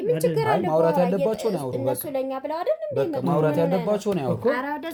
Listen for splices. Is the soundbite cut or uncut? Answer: uncut